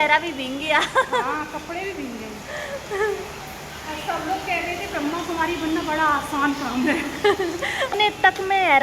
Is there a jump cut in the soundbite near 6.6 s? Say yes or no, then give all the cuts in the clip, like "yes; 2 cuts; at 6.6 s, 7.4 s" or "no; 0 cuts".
no; 1 cut; at 7.9 s